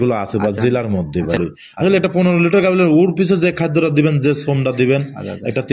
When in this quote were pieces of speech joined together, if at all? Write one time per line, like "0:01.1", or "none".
0:01.4